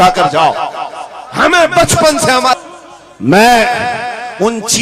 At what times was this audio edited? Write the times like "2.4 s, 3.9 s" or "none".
2.5 s